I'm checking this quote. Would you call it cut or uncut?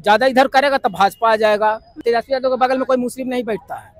cut